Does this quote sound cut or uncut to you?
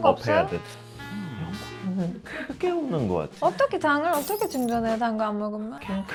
uncut